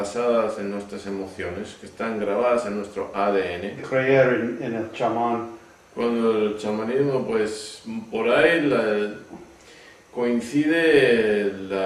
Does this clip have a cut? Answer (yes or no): no